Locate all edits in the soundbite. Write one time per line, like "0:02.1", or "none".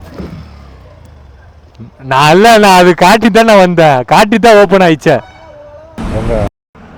0:05.8